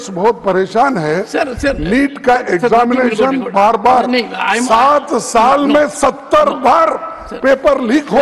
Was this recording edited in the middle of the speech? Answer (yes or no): no